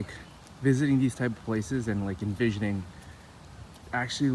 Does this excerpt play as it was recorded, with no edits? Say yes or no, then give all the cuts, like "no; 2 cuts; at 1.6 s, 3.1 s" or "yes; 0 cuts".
yes; 0 cuts